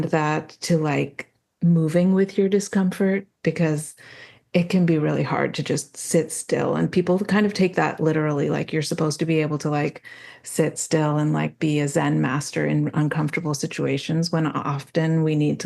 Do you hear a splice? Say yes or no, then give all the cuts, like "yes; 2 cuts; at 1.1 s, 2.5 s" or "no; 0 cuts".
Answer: no; 0 cuts